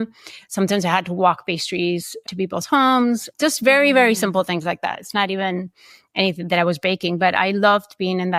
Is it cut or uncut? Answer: uncut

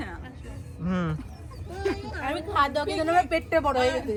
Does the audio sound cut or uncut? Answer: uncut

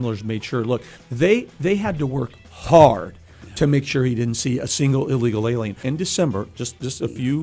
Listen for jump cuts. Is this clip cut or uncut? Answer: cut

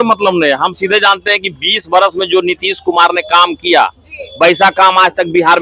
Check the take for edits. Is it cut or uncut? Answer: uncut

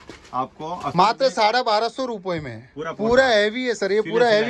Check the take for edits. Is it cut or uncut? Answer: uncut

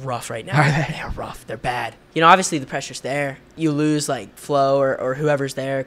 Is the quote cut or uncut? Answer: cut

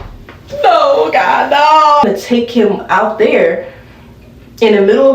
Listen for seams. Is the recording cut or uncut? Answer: cut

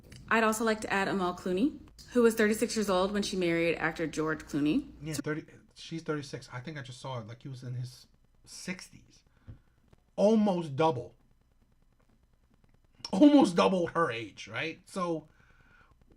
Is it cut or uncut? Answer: uncut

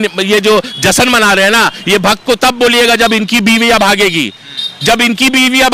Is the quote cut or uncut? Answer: uncut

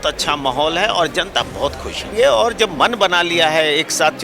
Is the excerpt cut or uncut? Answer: cut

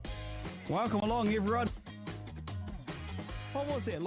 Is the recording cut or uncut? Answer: cut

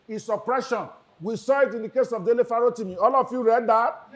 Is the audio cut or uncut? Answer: cut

